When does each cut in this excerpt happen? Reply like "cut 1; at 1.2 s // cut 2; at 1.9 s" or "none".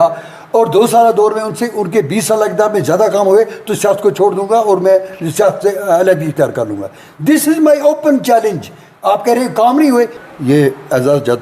cut 1; at 10.2 s